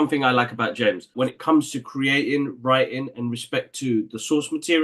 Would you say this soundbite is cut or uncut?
cut